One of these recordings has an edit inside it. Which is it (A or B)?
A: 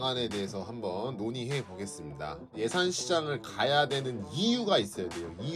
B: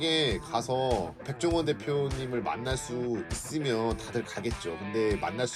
A